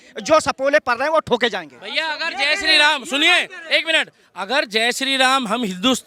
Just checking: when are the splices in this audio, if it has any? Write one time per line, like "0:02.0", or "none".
none